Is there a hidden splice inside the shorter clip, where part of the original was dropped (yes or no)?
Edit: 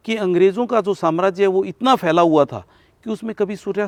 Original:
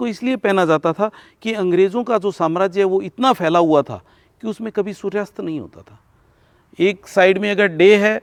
no